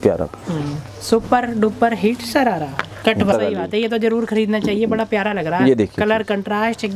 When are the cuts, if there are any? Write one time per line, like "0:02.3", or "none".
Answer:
0:03.3